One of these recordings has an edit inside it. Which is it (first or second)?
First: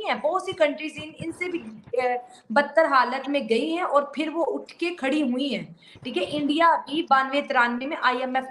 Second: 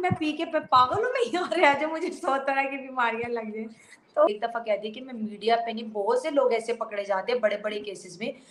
second